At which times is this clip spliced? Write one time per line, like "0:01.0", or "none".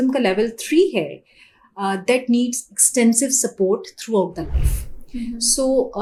none